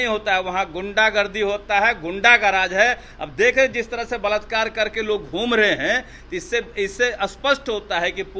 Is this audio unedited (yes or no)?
yes